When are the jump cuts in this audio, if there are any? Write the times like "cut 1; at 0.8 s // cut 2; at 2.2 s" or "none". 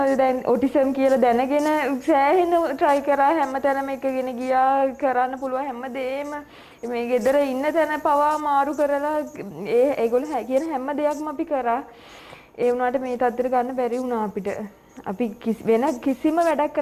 none